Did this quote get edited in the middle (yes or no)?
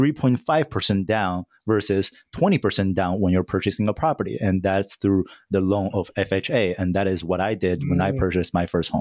no